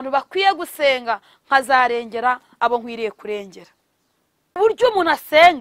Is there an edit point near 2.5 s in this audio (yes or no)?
no